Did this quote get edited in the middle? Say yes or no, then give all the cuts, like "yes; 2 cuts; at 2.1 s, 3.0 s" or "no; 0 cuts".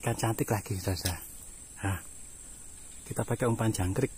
no; 0 cuts